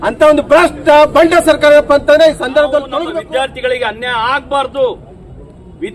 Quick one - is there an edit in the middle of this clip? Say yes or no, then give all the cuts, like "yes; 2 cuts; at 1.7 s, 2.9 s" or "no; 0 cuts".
yes; 1 cut; at 3.0 s